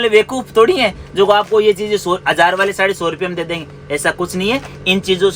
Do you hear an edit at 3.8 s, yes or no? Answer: no